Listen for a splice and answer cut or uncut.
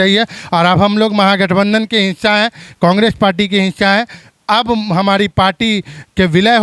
uncut